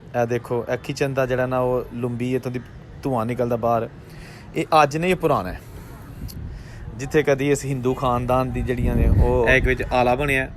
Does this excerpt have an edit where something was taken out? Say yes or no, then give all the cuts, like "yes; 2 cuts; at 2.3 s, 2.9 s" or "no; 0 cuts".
yes; 1 cut; at 9.5 s